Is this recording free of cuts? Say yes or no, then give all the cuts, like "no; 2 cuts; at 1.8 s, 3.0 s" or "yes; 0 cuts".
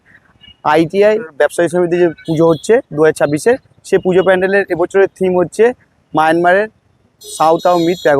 yes; 0 cuts